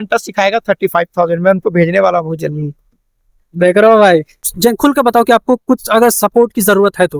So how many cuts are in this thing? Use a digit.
1